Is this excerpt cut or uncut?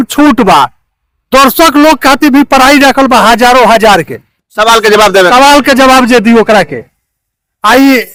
uncut